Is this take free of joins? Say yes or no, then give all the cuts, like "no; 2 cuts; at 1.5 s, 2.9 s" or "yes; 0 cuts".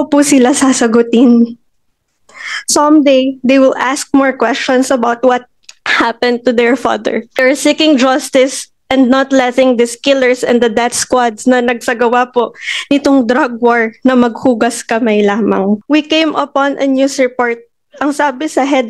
no; 2 cuts; at 7.4 s, 15.8 s